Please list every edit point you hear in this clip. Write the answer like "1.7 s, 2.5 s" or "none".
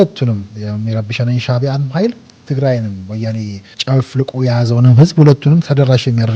2.3 s, 3.8 s, 5.6 s